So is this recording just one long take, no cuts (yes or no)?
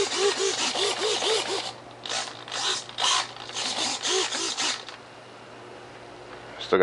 no